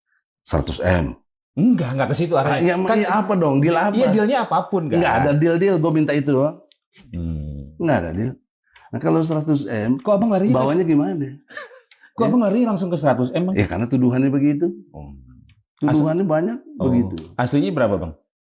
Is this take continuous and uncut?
yes; 0 cuts

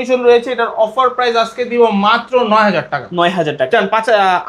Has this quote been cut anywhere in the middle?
no; 0 cuts

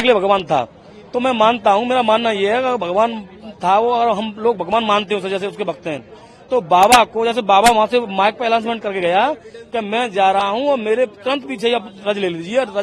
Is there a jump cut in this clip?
no; 0 cuts

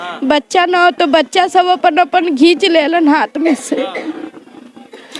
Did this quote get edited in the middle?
no; 0 cuts

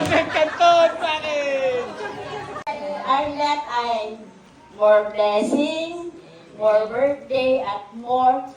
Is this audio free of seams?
no; 1 cut; at 2.6 s

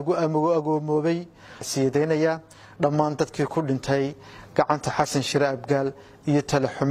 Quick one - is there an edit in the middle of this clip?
yes; 1 cut; at 1.6 s

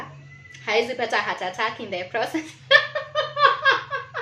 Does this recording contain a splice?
no; 0 cuts

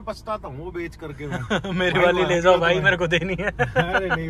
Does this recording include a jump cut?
no; 0 cuts

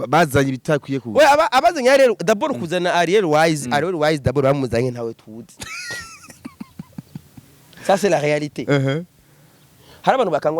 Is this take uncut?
yes; 0 cuts

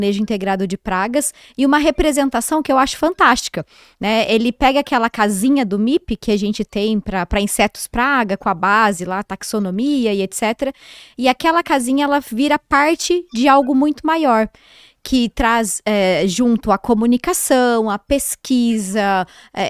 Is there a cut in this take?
no; 0 cuts

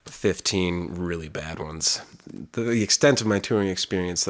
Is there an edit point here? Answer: yes; 1 cut; at 2.2 s

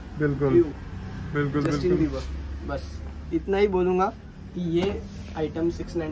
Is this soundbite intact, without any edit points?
yes; 0 cuts

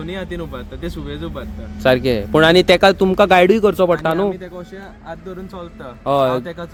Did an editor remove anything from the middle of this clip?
no; 0 cuts

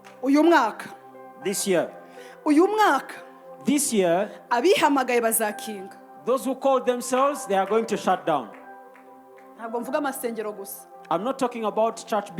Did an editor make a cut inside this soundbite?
no; 0 cuts

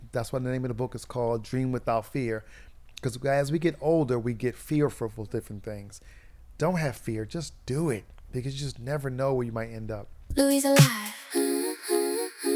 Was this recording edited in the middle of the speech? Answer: yes; 1 cut; at 10.2 s

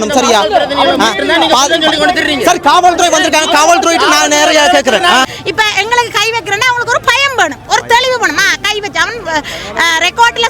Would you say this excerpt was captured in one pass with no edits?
no; 1 cut; at 5.3 s

